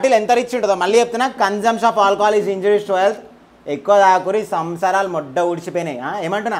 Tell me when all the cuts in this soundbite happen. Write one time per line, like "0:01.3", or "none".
none